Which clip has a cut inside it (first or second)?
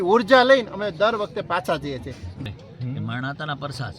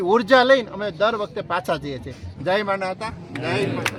first